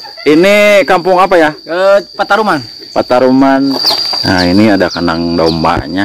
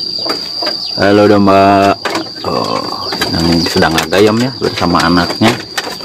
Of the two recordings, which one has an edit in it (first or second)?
first